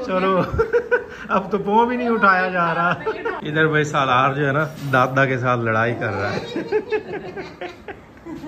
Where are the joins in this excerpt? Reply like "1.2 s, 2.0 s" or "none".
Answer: 3.4 s

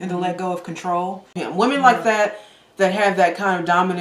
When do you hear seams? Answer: 1.4 s

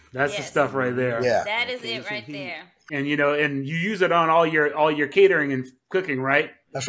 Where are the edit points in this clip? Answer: 2.8 s

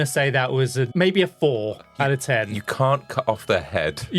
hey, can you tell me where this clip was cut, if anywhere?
0.9 s, 1.9 s

